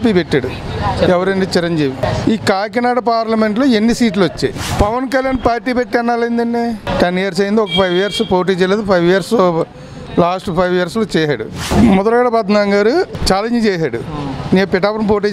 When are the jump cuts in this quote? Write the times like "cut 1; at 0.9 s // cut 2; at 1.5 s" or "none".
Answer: cut 1; at 2.0 s // cut 2; at 4.6 s // cut 3; at 6.9 s // cut 4; at 11.7 s // cut 5; at 13.2 s

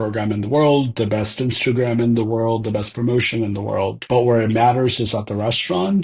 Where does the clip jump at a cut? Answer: cut 1; at 4.0 s

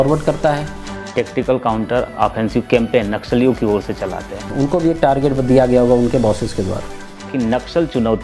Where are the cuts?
cut 1; at 1.0 s // cut 2; at 4.4 s // cut 3; at 7.3 s

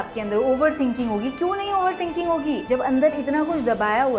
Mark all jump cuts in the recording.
none

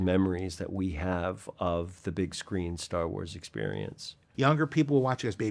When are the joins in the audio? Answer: cut 1; at 4.2 s

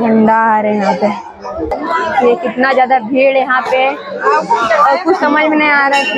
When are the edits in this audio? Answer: cut 1; at 1.7 s

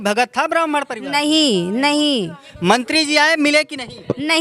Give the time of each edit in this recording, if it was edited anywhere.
cut 1; at 2.4 s

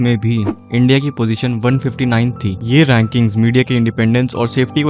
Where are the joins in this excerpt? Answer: none

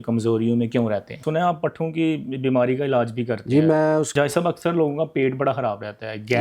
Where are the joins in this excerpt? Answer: cut 1; at 1.2 s // cut 2; at 4.1 s

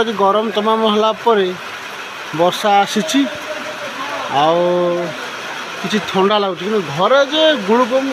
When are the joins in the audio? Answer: none

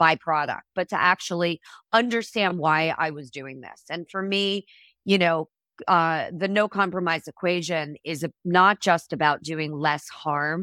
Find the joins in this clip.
none

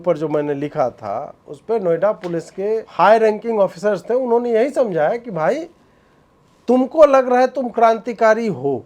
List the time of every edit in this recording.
cut 1; at 2.9 s

